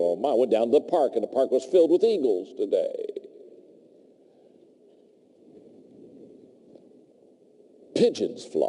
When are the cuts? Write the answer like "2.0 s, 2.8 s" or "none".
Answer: none